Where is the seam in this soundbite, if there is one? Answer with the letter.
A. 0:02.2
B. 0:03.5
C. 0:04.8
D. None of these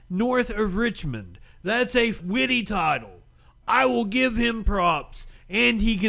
A